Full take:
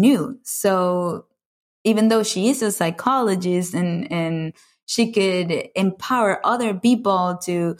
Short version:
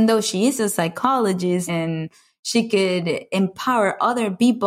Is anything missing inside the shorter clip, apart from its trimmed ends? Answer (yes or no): yes